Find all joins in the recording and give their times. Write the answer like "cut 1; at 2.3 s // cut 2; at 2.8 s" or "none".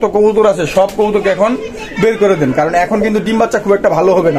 none